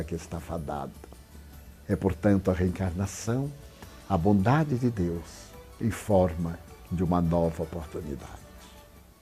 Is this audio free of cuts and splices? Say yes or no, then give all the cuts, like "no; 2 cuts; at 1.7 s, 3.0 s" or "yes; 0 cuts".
yes; 0 cuts